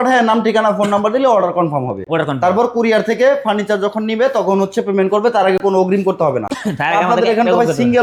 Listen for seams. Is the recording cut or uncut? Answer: uncut